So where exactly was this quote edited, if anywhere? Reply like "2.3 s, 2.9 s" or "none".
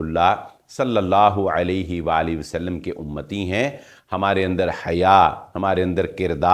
none